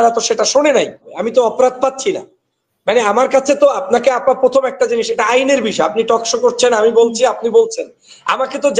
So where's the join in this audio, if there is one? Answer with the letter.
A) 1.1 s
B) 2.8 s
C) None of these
A